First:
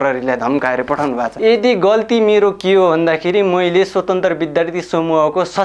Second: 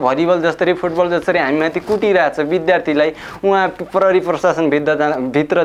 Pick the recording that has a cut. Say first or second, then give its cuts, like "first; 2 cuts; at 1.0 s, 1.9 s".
first; 1 cut; at 1.3 s